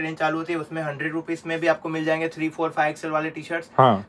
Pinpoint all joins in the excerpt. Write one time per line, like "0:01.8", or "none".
none